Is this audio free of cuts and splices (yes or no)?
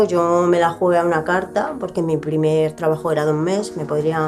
yes